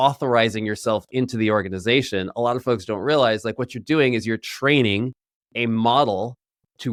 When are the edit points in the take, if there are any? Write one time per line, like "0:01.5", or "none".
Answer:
none